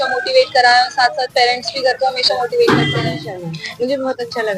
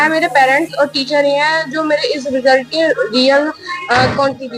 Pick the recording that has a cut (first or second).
first